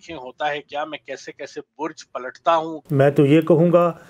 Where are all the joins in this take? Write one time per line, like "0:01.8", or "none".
0:02.8